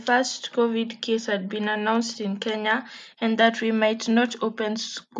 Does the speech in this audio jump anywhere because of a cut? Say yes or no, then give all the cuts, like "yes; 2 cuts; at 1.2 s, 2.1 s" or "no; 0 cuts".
no; 0 cuts